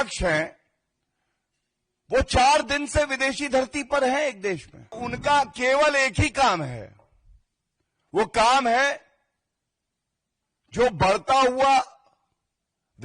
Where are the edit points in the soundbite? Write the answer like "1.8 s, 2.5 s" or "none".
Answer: 5.1 s

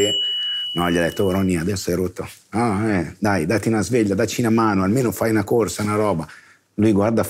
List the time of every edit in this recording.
none

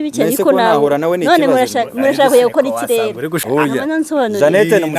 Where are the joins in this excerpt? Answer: 3.4 s

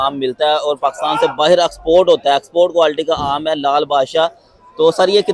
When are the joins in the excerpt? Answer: none

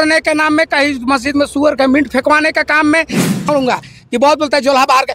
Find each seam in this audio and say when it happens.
3.5 s

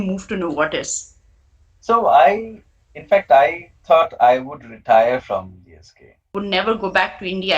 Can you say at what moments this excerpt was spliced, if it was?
6.3 s

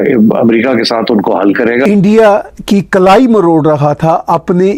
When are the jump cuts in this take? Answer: 1.8 s

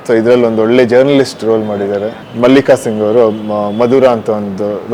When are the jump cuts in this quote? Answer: 2.2 s

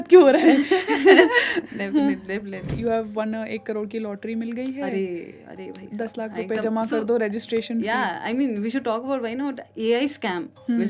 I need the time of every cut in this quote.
2.7 s

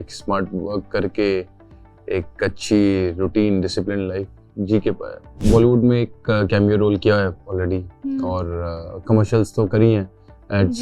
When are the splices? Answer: 5.4 s

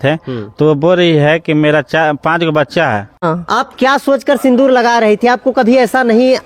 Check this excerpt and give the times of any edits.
3.2 s

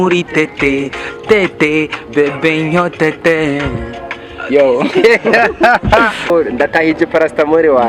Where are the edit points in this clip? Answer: 6.3 s

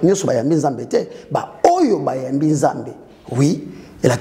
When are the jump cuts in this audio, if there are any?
none

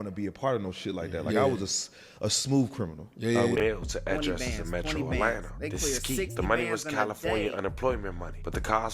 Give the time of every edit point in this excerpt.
3.6 s

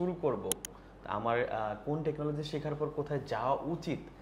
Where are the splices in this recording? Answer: none

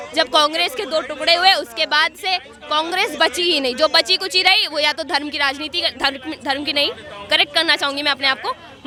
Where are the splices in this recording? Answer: none

